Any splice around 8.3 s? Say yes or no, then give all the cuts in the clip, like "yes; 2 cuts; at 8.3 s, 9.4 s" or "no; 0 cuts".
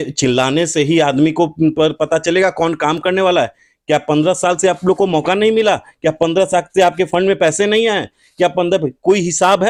no; 0 cuts